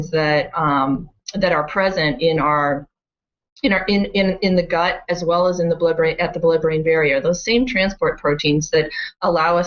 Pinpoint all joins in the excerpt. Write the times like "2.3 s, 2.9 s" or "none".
none